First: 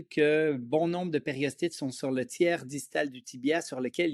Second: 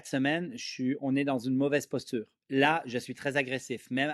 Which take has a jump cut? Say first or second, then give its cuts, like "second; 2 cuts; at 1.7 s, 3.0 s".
second; 1 cut; at 2.4 s